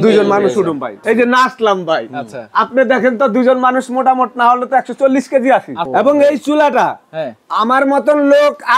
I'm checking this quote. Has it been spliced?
yes; 2 cuts; at 1.0 s, 5.8 s

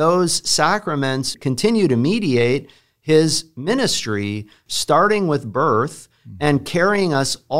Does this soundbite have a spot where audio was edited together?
yes; 2 cuts; at 1.3 s, 4.6 s

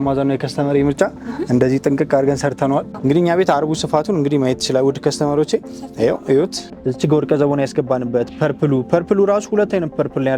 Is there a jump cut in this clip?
yes; 2 cuts; at 2.9 s, 6.7 s

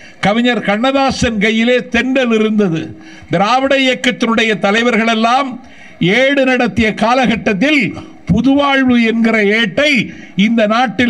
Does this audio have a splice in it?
no; 0 cuts

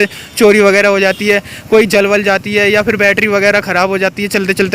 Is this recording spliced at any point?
no; 0 cuts

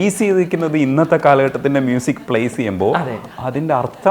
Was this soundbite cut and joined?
no; 0 cuts

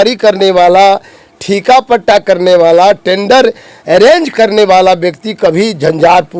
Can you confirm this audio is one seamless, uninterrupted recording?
yes; 0 cuts

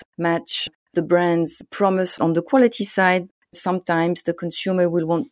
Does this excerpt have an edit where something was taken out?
yes; 1 cut; at 3.6 s

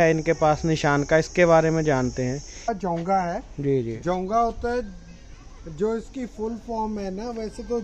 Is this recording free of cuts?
no; 1 cut; at 2.7 s

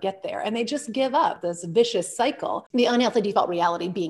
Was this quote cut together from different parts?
yes; 2 cuts; at 1.5 s, 2.6 s

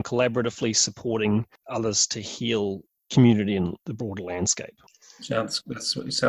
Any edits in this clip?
yes; 2 cuts; at 1.6 s, 3.8 s

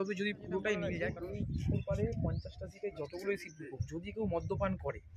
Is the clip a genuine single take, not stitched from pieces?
no; 1 cut; at 1.1 s

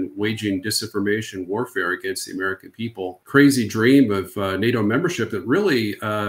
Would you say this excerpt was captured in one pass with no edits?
no; 1 cut; at 3.2 s

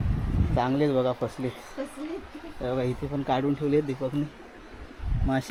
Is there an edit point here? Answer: no; 0 cuts

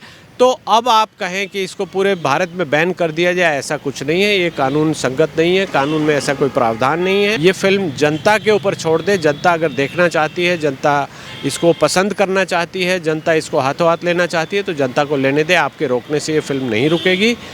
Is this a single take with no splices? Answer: no; 1 cut; at 7.4 s

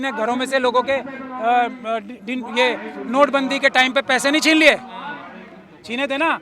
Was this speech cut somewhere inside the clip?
no; 0 cuts

